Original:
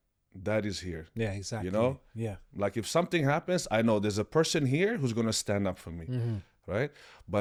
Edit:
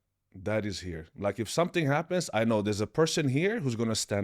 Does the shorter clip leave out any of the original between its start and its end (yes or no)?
yes